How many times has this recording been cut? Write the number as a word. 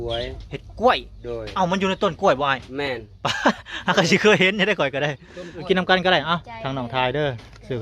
one